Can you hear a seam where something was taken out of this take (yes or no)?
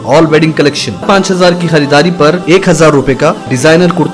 yes